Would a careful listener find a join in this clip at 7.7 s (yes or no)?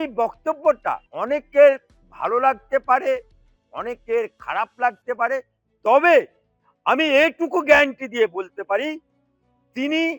no